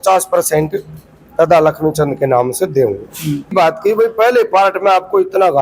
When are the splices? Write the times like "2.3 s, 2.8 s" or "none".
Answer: 3.5 s